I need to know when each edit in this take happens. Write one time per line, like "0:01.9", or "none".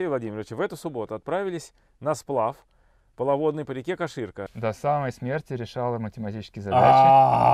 0:04.5